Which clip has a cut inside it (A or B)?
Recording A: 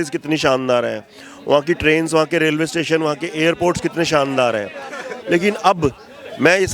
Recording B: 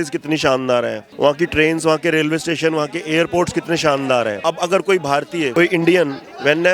B